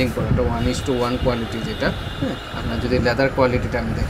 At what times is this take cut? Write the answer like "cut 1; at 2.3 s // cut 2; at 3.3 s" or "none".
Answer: none